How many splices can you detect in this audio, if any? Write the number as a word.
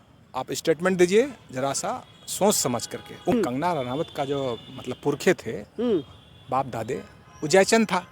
one